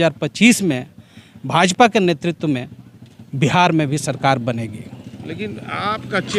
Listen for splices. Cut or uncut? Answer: uncut